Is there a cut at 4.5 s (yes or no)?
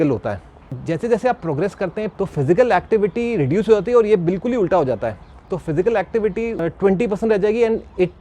no